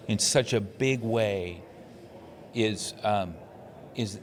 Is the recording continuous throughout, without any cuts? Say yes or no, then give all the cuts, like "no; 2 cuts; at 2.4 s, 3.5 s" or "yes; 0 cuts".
yes; 0 cuts